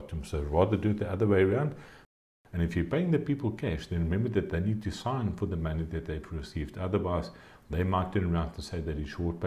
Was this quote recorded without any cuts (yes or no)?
no